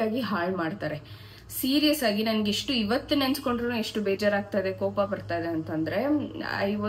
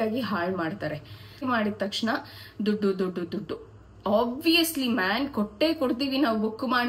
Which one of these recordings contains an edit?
second; 1 cut; at 1.4 s

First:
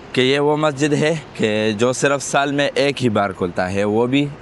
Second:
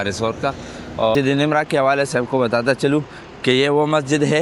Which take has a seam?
second; 1 cut; at 1.1 s

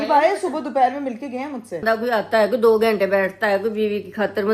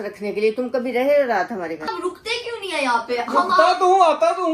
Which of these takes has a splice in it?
first; 1 cut; at 1.8 s

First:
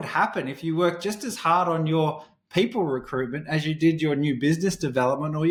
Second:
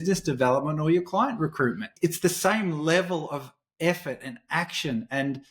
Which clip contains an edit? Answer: second; 1 cut; at 1.9 s

